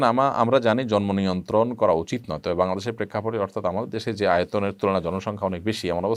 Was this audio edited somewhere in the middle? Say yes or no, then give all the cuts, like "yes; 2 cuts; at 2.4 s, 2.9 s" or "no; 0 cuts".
no; 0 cuts